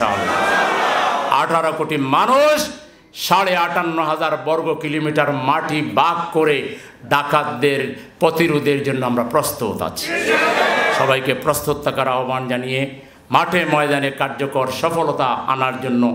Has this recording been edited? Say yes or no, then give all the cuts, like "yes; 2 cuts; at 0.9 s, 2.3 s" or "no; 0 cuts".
no; 0 cuts